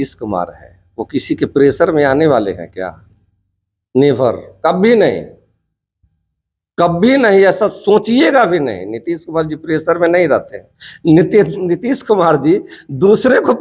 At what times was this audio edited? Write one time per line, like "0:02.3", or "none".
none